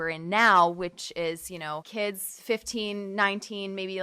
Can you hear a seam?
yes; 1 cut; at 1.9 s

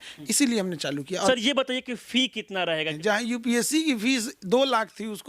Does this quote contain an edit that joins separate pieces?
yes; 2 cuts; at 1.3 s, 2.9 s

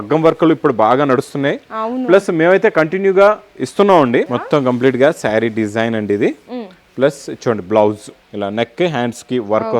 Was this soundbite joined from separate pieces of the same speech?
yes; 2 cuts; at 4.4 s, 8.2 s

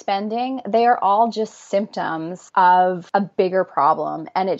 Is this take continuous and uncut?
no; 2 cuts; at 2.3 s, 3.0 s

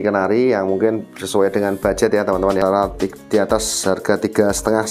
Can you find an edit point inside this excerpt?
yes; 1 cut; at 2.6 s

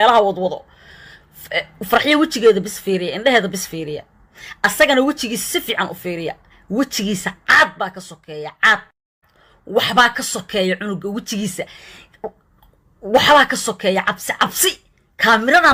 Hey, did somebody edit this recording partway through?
no; 0 cuts

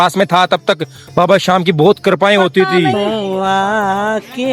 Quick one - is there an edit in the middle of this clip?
yes; 1 cut; at 3.1 s

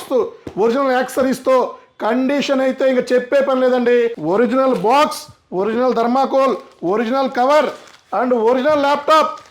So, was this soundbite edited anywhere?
yes; 1 cut; at 4.2 s

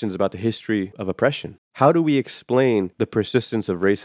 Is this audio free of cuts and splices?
no; 2 cuts; at 1.4 s, 2.9 s

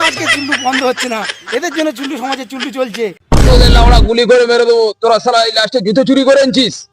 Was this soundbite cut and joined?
yes; 1 cut; at 3.2 s

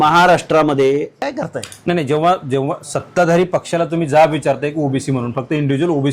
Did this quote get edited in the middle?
yes; 1 cut; at 1.2 s

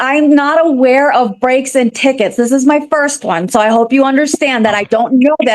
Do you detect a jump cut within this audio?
no; 0 cuts

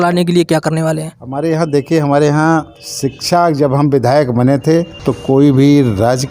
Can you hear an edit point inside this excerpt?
no; 0 cuts

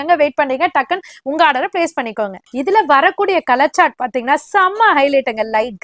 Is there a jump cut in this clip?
yes; 1 cut; at 2.4 s

